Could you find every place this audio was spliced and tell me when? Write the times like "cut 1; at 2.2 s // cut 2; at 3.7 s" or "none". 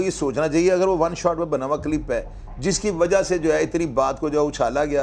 none